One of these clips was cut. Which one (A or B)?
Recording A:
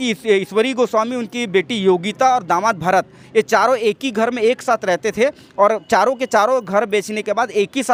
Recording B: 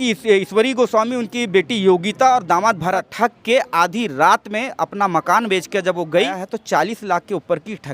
B